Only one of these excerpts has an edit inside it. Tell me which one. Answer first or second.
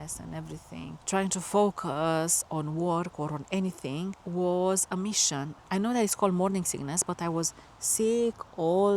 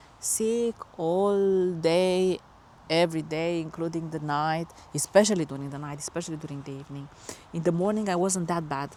first